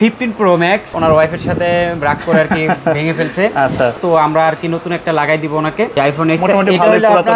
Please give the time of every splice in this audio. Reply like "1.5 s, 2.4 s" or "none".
0.9 s, 4.0 s, 6.0 s